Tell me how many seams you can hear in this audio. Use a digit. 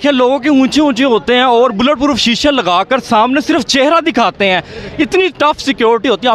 0